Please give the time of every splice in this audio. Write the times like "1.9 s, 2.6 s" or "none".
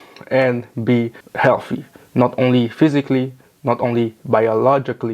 1.2 s